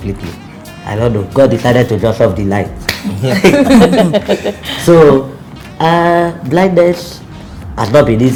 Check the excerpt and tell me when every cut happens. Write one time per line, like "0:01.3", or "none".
none